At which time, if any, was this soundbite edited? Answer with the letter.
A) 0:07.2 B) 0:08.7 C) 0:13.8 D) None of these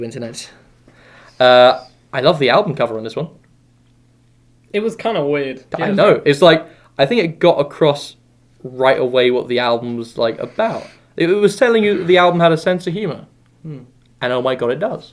B